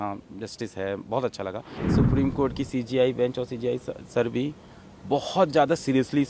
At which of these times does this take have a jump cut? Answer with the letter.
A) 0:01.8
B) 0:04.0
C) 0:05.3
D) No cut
A